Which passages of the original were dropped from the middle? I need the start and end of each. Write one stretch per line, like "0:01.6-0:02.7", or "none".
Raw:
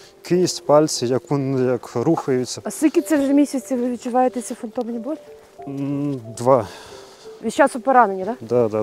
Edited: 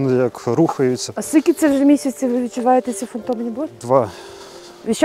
0:05.2-0:06.3